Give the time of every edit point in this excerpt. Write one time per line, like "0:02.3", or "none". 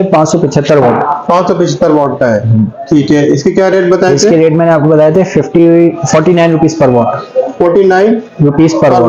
none